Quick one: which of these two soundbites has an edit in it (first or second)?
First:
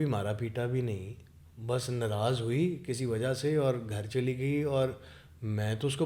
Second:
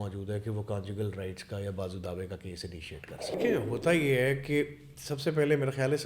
second